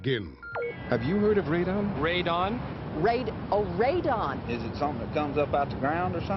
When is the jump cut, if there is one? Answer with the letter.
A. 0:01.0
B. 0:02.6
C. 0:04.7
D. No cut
C